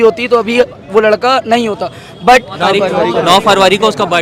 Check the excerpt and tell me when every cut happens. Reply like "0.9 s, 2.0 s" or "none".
2.5 s